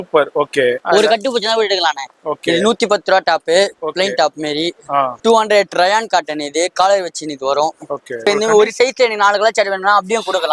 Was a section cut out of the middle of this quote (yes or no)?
yes